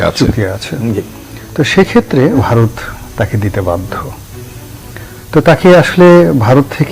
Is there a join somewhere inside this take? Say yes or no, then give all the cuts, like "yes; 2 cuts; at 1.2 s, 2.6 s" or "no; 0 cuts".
yes; 1 cut; at 2.4 s